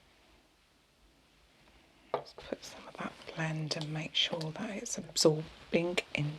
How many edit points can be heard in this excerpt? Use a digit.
1